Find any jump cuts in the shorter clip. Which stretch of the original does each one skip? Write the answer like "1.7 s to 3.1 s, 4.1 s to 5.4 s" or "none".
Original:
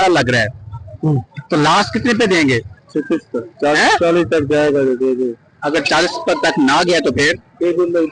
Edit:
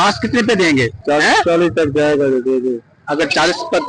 2.7 s to 3.5 s

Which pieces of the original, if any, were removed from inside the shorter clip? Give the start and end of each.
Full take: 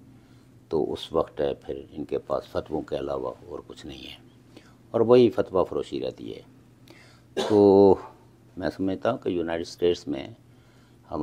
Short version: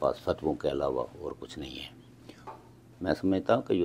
4.8 s to 8.1 s

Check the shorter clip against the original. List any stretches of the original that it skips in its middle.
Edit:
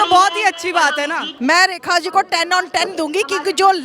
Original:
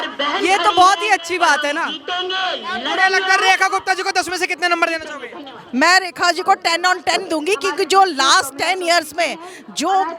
1.9 s to 5.6 s

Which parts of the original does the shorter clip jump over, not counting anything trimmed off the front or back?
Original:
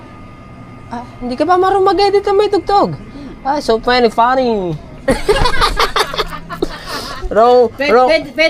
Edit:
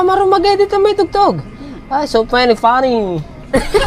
none

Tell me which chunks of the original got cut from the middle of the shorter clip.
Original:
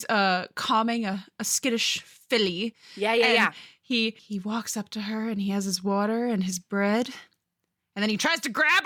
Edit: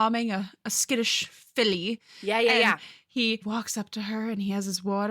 4.2 s to 4.4 s

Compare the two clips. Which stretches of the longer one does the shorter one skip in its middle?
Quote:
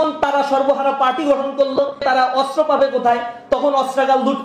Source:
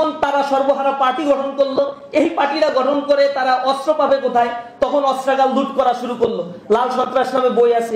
2.0 s to 3.3 s

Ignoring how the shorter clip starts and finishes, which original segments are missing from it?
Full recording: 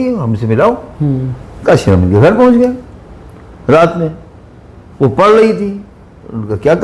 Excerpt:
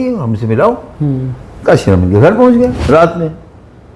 2.8 s to 3.6 s

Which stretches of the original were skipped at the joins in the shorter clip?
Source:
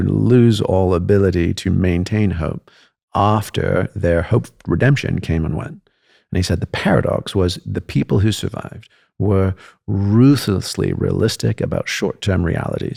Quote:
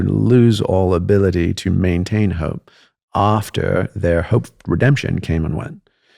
none

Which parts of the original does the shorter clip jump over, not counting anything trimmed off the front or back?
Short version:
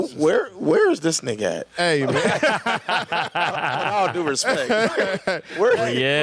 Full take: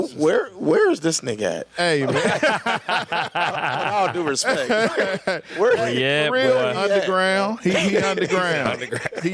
none

